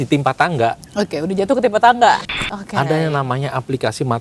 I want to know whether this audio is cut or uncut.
cut